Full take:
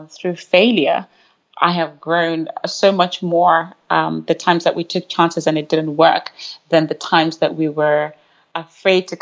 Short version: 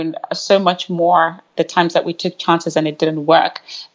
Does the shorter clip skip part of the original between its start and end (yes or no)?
yes